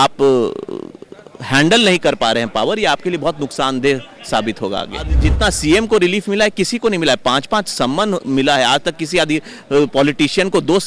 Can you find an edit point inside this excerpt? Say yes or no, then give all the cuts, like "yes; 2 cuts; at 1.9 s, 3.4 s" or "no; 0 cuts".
yes; 1 cut; at 5.2 s